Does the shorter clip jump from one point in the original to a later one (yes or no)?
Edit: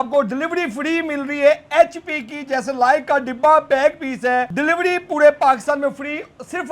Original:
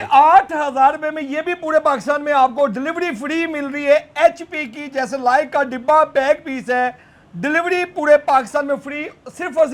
yes